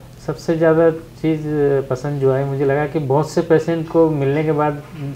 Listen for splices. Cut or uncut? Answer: uncut